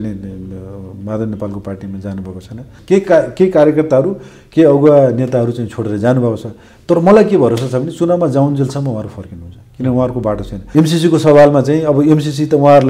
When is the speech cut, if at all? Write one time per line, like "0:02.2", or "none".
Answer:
0:02.7
0:10.6